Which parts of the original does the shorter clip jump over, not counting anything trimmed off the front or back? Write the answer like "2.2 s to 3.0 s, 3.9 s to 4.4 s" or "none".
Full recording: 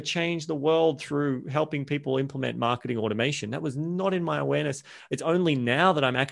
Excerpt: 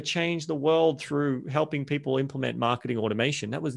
none